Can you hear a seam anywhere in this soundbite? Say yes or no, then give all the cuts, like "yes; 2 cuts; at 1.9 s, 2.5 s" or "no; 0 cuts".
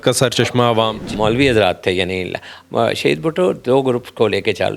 yes; 1 cut; at 1.1 s